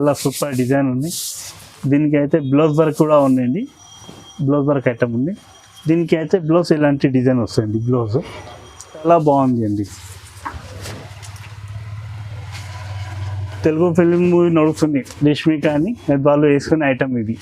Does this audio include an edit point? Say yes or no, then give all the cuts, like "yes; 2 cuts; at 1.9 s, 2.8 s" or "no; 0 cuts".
yes; 1 cut; at 9.0 s